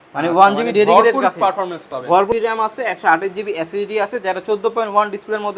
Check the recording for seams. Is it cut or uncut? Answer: cut